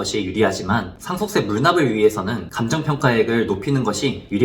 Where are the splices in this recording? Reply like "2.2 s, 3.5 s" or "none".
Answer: 1.0 s, 2.5 s